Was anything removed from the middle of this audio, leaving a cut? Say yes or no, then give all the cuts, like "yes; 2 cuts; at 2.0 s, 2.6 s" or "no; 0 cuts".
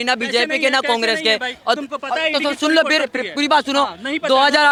no; 0 cuts